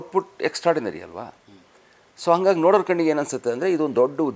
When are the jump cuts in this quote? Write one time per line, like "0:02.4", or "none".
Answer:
none